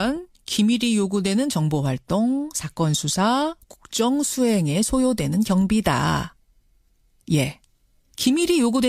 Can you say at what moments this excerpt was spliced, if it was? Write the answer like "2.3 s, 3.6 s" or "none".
none